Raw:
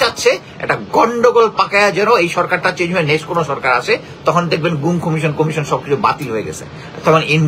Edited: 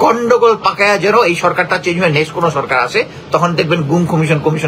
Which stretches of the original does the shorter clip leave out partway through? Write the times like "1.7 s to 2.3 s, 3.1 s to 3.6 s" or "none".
none